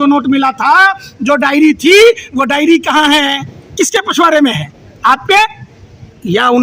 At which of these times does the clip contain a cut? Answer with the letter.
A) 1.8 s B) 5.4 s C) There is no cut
C